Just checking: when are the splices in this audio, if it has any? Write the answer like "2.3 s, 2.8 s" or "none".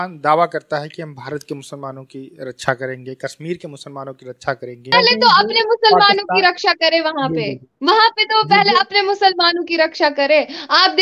4.9 s